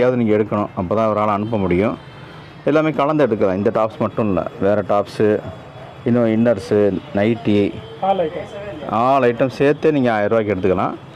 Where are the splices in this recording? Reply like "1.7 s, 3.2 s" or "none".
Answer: none